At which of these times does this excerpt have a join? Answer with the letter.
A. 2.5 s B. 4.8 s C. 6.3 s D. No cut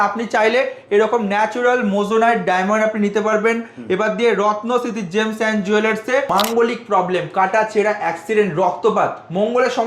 C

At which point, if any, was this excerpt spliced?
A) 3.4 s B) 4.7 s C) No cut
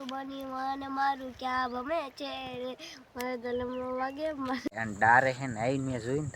B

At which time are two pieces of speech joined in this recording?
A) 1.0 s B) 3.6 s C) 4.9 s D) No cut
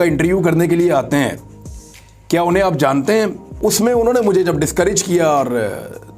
B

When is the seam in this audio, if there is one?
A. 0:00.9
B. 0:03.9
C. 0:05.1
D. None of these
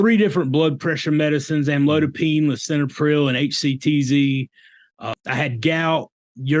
C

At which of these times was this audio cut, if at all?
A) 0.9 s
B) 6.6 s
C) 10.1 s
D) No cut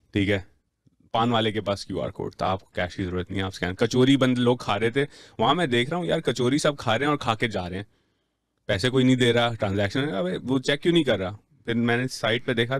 D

